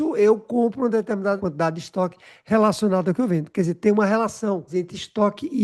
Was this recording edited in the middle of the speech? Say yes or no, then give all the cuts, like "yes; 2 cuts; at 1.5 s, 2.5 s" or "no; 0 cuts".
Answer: yes; 2 cuts; at 1.4 s, 4.7 s